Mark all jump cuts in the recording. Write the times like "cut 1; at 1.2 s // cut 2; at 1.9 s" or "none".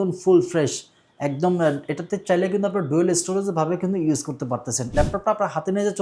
cut 1; at 4.8 s